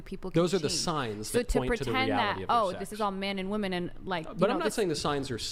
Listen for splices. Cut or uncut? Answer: uncut